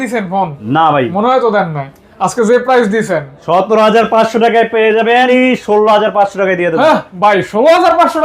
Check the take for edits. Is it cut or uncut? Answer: cut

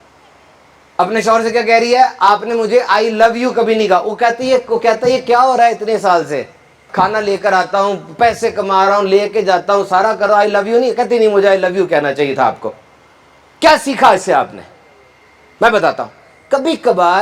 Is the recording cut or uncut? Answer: cut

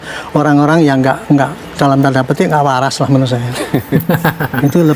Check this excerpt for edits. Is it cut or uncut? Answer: uncut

